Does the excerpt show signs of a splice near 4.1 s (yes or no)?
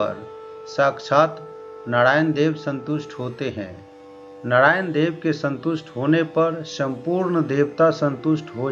yes